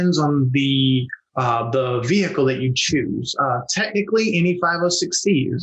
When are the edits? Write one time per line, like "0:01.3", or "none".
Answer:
0:01.2